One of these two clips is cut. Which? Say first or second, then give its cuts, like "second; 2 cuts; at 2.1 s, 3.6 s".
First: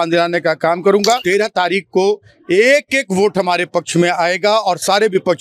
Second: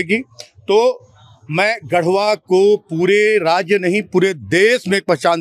first; 1 cut; at 1.2 s